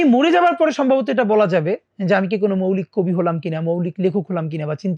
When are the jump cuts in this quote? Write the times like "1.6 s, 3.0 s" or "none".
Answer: none